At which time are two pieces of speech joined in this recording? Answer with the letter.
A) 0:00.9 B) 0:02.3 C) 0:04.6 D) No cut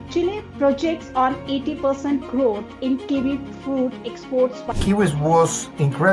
C